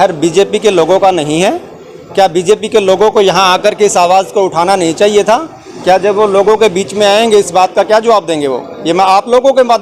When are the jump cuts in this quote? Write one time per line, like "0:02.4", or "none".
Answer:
none